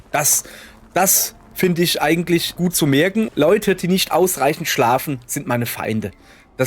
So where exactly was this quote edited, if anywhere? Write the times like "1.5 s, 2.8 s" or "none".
2.9 s

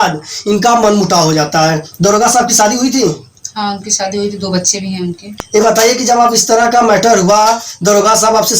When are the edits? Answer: 5.3 s

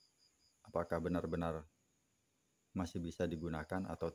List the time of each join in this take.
none

